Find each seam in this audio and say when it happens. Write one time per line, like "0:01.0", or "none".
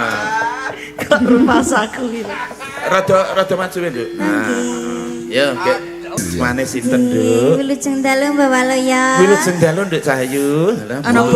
0:06.2